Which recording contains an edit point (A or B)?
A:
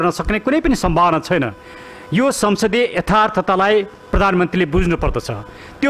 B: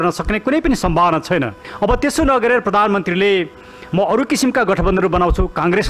B